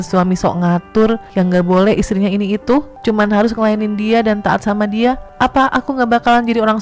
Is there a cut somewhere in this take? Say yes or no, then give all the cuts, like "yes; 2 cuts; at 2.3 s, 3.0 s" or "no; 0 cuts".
yes; 3 cuts; at 1.3 s, 2.9 s, 5.3 s